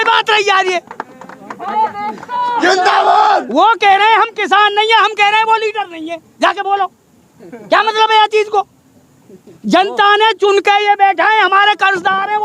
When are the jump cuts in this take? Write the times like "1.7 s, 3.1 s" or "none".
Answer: none